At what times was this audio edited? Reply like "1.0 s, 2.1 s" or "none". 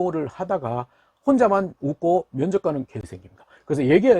3.1 s